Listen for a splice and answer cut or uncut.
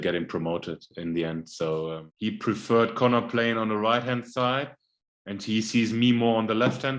cut